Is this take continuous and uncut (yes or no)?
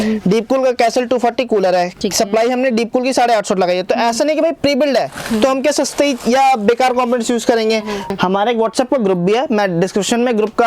no